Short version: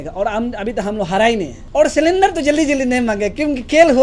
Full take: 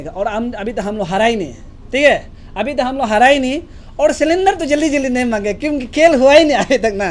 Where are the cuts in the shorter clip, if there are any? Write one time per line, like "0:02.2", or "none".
0:01.6

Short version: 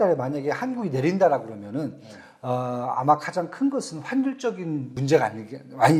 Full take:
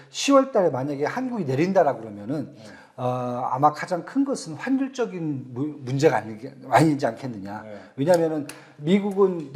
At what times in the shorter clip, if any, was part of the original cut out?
0:04.9

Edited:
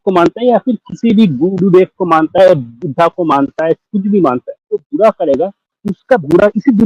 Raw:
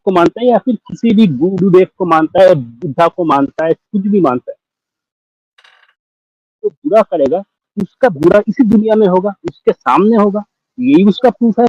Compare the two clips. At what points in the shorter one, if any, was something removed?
0:04.5

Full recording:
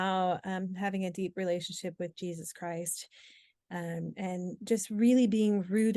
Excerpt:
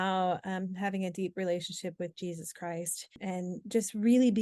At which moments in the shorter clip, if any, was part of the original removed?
0:03.2

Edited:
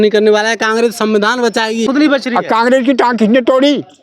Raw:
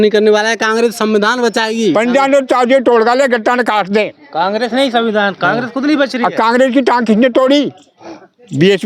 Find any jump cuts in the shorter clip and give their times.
0:01.8

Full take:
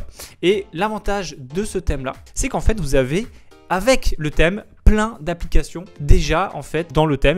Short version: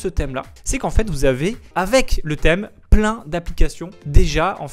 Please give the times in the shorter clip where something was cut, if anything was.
0:01.6

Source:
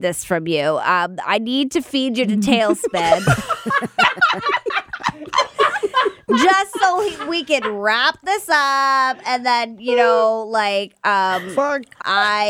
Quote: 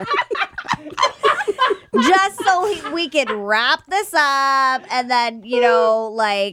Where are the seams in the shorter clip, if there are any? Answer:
none

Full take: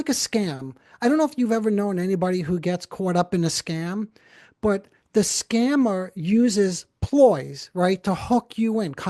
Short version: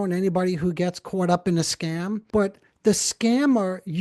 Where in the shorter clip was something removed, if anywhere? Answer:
0:02.2

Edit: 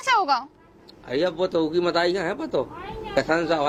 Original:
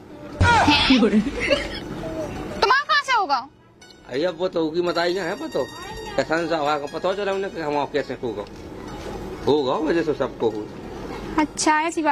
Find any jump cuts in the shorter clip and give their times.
none

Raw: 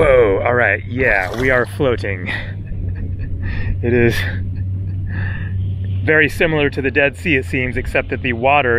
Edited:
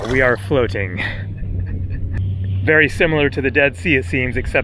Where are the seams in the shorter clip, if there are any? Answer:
0:02.2

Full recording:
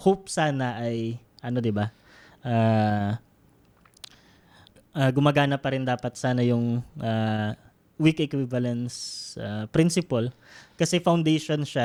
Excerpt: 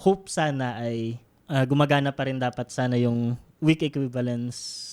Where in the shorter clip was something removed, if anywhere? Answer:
0:01.3
0:03.4

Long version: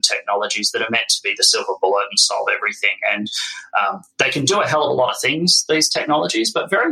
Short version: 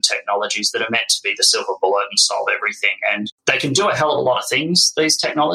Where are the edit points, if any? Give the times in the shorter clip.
0:03.4

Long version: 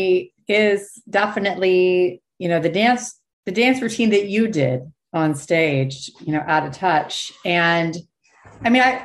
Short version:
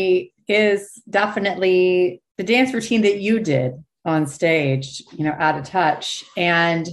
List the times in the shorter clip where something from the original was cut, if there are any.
0:02.3

